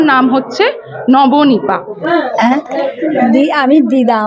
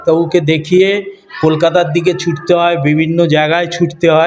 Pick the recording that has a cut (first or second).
first